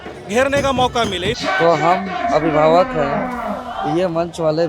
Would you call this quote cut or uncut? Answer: cut